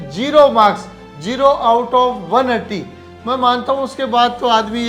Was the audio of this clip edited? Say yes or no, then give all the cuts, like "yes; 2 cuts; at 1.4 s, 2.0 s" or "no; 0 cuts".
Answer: no; 0 cuts